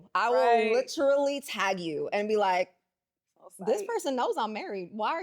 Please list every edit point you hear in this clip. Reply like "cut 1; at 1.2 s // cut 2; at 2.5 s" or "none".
none